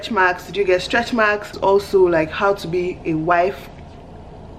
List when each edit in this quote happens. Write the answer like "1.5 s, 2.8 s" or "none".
1.5 s